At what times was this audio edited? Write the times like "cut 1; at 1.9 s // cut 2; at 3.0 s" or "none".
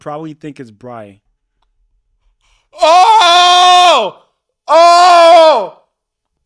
none